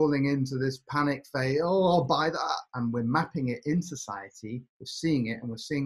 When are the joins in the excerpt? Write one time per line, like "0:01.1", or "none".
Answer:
0:02.7